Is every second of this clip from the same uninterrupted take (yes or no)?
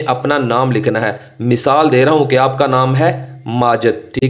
yes